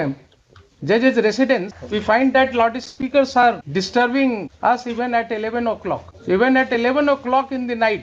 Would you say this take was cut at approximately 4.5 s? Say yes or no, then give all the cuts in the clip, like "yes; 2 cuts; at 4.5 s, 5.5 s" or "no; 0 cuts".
yes; 4 cuts; at 1.8 s, 3.6 s, 4.5 s, 6.1 s